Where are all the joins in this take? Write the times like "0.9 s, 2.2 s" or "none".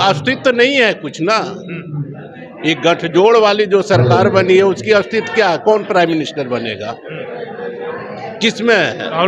none